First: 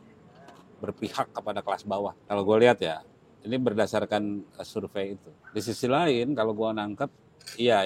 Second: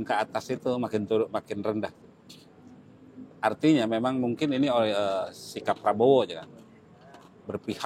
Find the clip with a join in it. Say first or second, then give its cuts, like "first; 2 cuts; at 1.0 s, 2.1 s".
first; 2 cuts; at 2.2 s, 5.3 s